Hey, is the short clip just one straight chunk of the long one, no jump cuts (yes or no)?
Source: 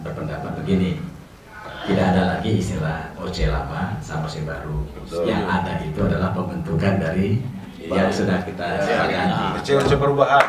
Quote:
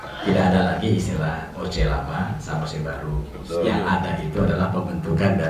yes